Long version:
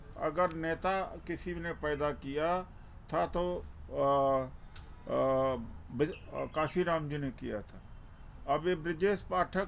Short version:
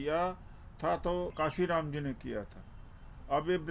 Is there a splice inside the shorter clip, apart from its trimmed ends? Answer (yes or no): yes